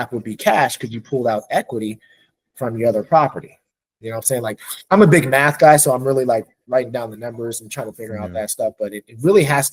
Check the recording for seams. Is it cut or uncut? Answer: uncut